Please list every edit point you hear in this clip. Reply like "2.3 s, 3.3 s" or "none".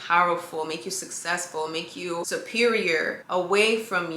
2.3 s, 3.2 s

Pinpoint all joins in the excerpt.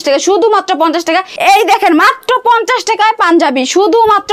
1.3 s

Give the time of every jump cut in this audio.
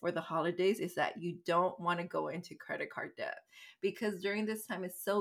none

